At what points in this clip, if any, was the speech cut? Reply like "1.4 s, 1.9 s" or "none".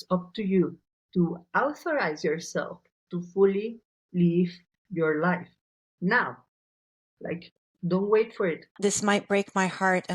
8.6 s

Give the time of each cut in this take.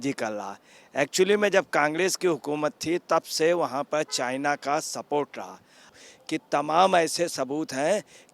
5.9 s

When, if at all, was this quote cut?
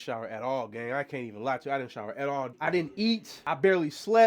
2.5 s

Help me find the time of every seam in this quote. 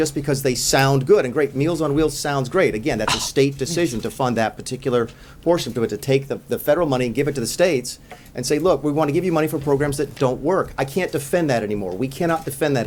none

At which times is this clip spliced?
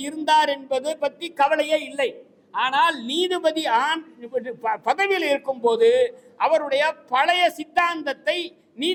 none

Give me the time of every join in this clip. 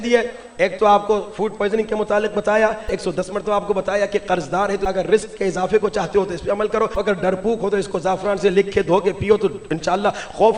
2.9 s, 4.8 s, 7.0 s

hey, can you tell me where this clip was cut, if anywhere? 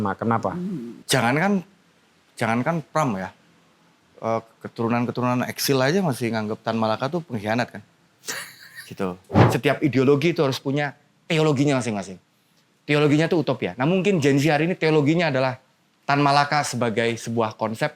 0.9 s, 9.3 s

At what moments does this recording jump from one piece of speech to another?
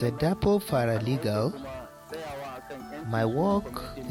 none

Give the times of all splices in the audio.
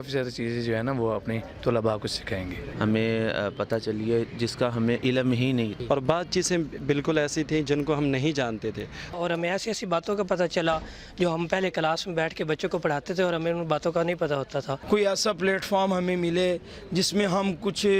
2.6 s, 5.8 s, 9.1 s, 14.8 s

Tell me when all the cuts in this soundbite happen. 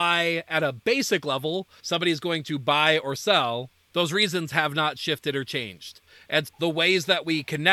1.8 s, 3.8 s

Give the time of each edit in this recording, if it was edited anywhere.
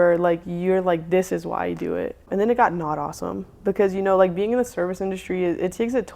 2.2 s

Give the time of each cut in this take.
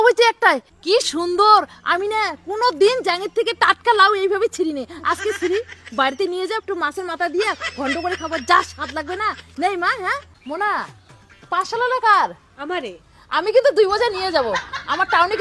10.3 s

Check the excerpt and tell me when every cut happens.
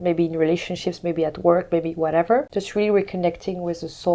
2.5 s

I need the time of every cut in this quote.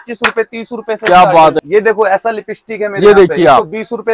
1.6 s

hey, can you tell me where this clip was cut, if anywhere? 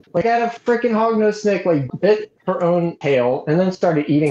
1.9 s, 3.0 s

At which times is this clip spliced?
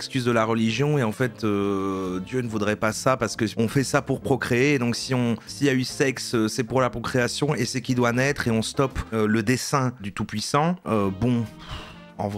10.0 s

